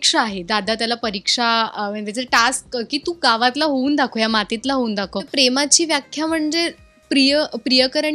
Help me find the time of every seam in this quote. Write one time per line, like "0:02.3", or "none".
0:05.3